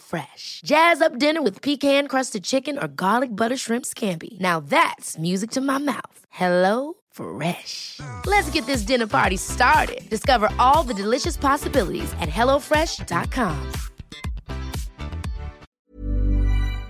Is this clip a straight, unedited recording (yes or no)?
no